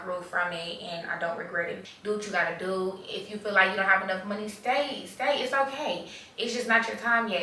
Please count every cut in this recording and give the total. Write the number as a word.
one